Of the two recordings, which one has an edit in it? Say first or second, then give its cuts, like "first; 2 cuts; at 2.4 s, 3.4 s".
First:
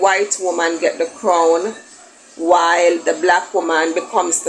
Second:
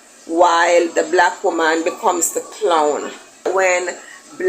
second; 1 cut; at 3.4 s